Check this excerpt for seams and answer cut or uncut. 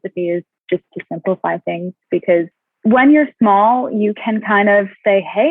cut